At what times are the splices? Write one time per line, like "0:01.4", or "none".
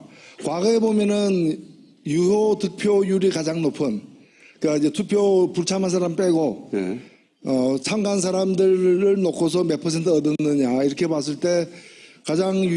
0:05.9